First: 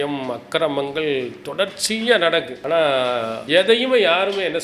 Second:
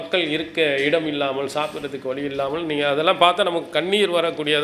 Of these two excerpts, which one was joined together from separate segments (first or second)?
first